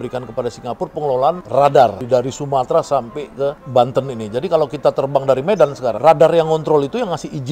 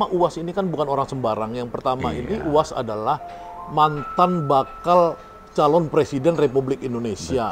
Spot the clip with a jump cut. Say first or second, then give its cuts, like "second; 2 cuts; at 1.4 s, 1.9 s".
first; 4 cuts; at 1.4 s, 2.0 s, 3.6 s, 6.0 s